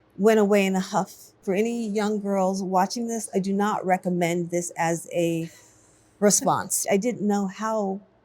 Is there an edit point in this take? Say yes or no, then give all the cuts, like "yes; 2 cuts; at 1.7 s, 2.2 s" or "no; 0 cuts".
yes; 2 cuts; at 1.3 s, 6.8 s